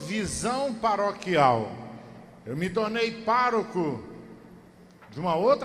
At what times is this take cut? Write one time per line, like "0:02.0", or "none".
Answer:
0:04.1